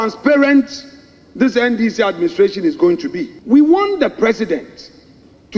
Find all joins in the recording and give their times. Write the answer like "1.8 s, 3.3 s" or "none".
3.3 s